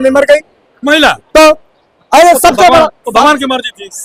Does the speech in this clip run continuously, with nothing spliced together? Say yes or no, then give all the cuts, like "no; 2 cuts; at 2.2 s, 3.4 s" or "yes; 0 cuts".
yes; 0 cuts